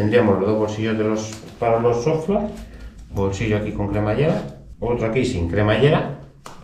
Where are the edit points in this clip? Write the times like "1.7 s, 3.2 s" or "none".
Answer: 4.6 s